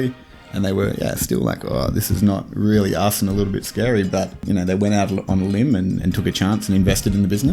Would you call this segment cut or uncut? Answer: cut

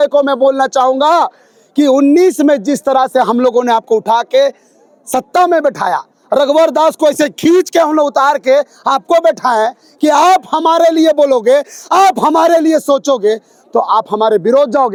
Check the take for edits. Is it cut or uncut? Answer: uncut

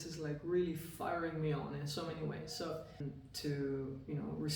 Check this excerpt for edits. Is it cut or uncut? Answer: cut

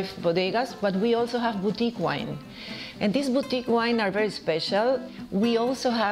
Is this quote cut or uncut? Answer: cut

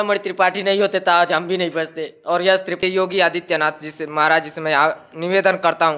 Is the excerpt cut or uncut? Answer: cut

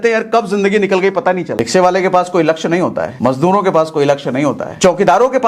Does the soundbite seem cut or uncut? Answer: cut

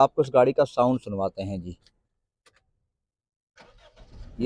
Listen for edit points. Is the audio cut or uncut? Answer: uncut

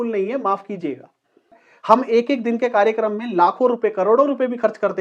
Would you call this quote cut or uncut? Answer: cut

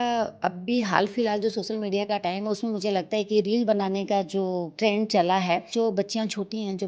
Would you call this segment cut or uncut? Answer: cut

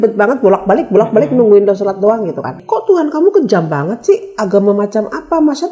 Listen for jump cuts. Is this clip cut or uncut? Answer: cut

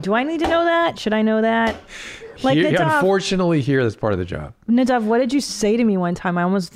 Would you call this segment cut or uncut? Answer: uncut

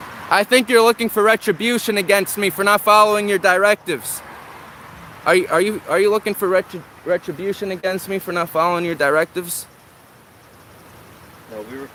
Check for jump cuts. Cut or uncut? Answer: uncut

